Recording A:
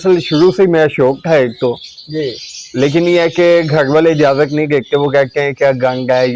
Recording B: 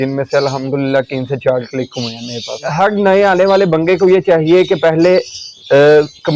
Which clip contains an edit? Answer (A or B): B